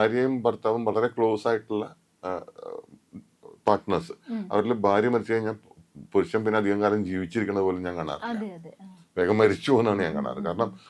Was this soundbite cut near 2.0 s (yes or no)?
no